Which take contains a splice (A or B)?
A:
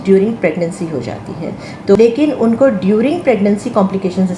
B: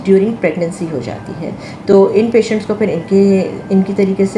A